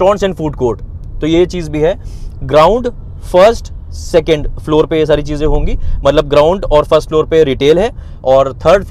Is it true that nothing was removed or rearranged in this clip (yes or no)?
yes